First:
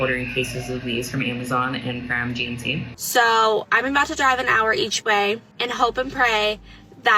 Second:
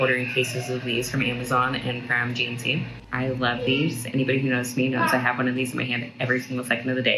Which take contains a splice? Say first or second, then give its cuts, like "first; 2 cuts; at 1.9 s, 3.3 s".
first; 2 cuts; at 2.9 s, 5.5 s